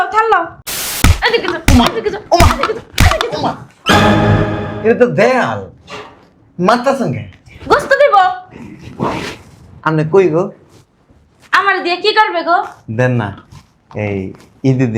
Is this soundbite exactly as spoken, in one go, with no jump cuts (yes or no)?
no